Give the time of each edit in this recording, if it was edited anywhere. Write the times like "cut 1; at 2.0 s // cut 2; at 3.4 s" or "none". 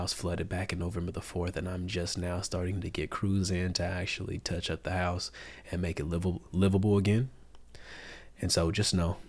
none